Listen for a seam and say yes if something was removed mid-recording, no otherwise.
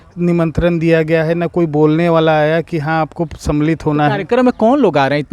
no